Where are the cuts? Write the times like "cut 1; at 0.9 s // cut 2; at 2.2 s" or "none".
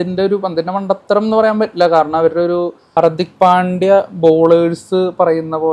cut 1; at 2.8 s